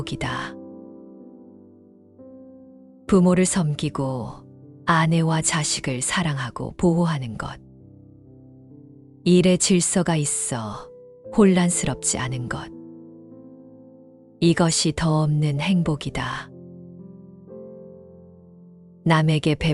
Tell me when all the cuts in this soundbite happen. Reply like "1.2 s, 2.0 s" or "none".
7.7 s, 9.2 s, 12.6 s, 14.3 s